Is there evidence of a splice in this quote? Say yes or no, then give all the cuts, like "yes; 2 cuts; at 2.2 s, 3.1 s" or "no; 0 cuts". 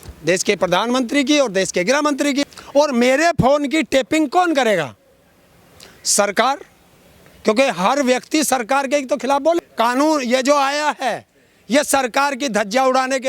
yes; 2 cuts; at 2.6 s, 9.6 s